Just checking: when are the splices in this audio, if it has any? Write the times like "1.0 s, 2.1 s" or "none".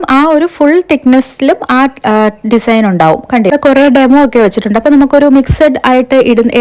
3.5 s